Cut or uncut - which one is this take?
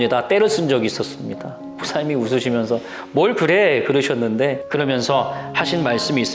cut